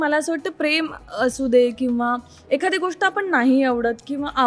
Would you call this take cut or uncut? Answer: uncut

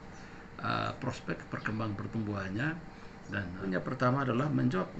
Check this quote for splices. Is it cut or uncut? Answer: cut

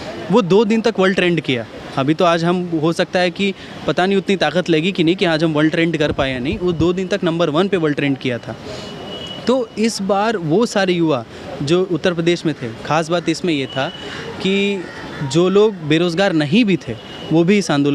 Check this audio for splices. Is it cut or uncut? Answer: uncut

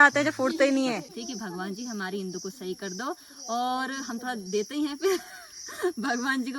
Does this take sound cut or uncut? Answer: cut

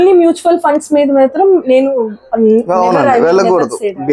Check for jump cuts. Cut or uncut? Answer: uncut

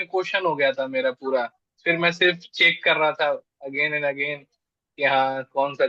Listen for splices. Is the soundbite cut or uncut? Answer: uncut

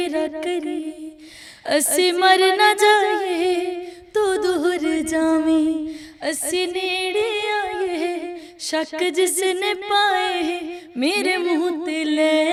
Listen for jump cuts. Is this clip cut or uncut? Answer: uncut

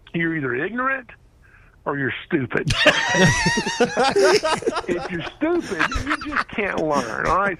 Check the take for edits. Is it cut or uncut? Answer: uncut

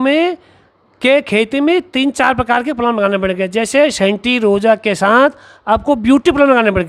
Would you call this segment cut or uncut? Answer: uncut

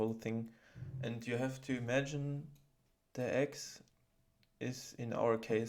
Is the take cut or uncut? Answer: uncut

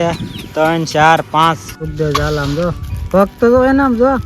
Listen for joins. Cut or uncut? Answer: cut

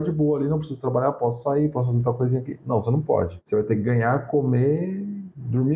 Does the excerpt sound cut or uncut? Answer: uncut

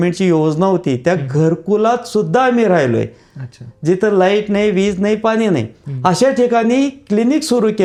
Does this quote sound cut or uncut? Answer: uncut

